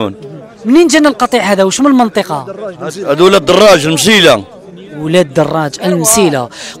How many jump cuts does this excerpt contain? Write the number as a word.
zero